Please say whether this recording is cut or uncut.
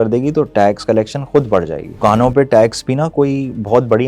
cut